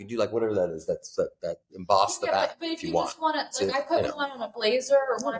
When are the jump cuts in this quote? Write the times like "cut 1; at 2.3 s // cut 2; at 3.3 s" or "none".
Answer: none